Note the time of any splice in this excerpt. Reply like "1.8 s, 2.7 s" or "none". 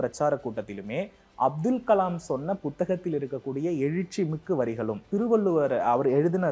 5.1 s